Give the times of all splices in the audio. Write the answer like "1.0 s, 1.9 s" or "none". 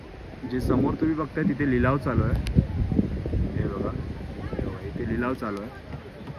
none